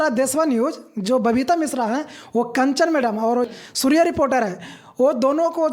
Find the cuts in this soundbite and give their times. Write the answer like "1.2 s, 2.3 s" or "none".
3.5 s

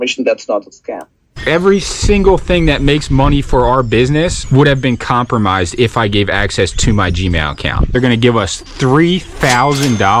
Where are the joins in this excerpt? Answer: 1.3 s, 7.9 s

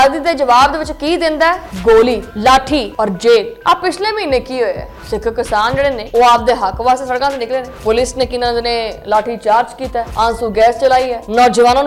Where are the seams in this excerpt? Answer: none

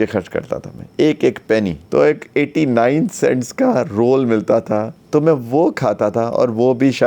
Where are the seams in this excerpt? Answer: 1.8 s, 5.0 s

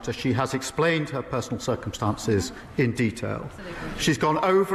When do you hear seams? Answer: none

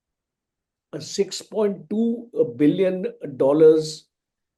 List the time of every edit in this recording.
none

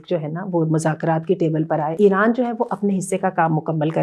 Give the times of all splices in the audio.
1.9 s

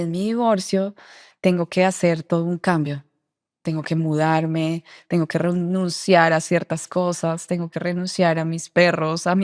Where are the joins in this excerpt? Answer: none

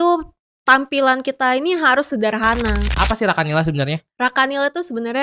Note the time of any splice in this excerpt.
2.9 s

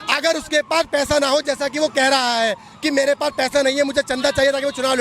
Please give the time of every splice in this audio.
none

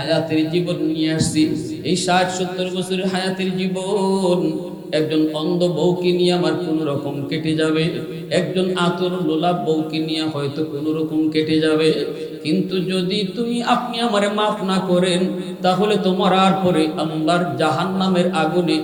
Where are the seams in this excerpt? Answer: none

